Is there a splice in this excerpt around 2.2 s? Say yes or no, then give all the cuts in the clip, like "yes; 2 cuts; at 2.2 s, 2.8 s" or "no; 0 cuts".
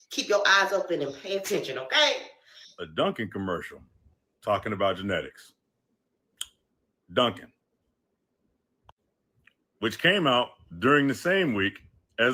no; 0 cuts